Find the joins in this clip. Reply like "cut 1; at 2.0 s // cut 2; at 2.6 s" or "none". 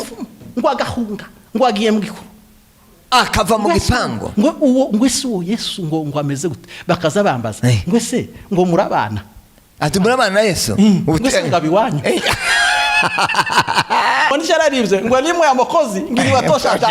cut 1; at 14.3 s